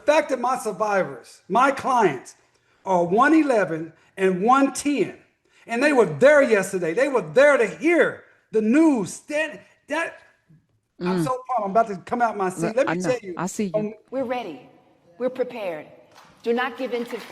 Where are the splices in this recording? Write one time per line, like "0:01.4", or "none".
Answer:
0:14.0